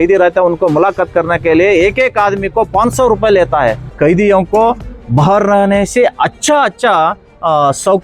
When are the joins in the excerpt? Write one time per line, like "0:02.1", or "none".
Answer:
0:03.9